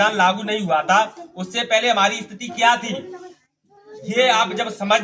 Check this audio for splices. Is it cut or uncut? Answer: uncut